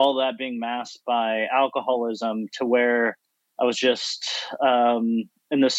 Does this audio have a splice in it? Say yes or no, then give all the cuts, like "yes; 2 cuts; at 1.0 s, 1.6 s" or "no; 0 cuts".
no; 0 cuts